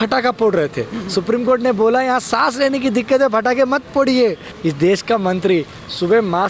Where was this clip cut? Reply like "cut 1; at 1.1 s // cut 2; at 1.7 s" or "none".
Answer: cut 1; at 4.5 s